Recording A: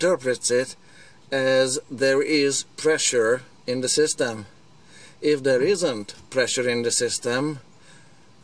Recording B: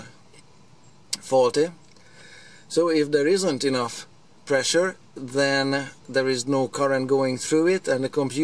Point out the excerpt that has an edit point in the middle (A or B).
A